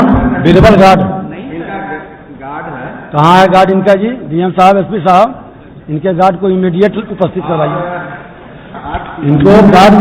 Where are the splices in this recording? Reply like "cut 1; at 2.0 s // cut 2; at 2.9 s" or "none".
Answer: cut 1; at 8.8 s